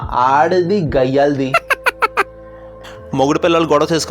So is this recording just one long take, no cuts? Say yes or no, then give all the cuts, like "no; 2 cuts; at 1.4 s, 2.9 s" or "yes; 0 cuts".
no; 2 cuts; at 1.5 s, 2.6 s